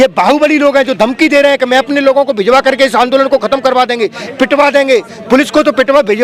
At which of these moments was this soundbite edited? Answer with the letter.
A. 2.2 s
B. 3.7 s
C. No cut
C